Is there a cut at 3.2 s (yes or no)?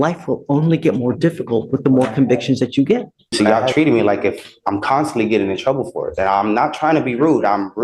yes